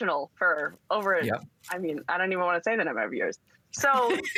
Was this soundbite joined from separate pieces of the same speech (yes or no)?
no